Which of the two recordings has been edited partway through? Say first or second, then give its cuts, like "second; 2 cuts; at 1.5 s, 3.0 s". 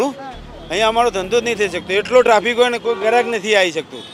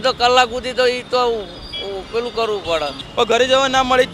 second; 1 cut; at 3.0 s